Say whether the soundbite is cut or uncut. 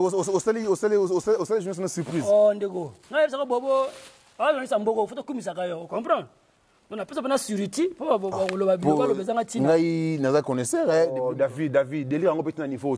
uncut